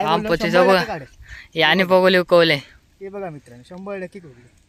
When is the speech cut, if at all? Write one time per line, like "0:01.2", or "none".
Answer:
none